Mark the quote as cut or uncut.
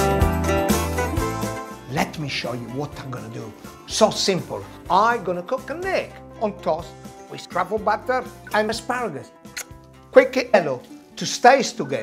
uncut